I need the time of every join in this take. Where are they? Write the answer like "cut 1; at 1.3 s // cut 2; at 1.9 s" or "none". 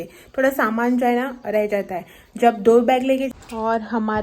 cut 1; at 3.3 s